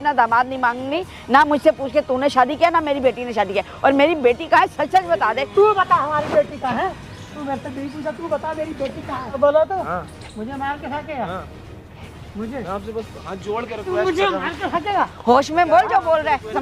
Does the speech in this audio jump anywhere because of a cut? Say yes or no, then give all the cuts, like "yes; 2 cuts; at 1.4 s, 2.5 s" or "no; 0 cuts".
yes; 2 cuts; at 5.4 s, 9.4 s